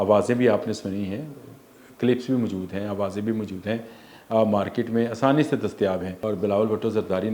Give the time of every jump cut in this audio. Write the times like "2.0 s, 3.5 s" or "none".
6.1 s